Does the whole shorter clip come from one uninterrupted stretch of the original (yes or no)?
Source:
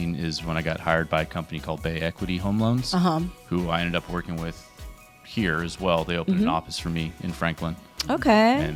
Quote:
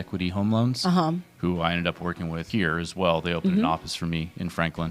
no